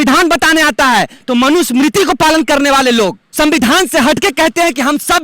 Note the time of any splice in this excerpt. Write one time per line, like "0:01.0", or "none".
0:03.2